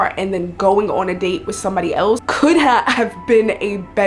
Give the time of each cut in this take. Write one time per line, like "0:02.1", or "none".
0:02.2